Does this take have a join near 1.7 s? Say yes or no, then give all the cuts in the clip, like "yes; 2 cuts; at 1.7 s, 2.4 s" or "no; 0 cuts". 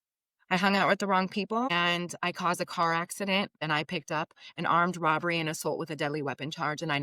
yes; 2 cuts; at 1.7 s, 3.6 s